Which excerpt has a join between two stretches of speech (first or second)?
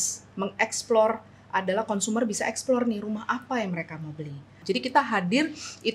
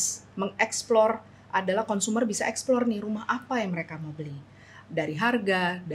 first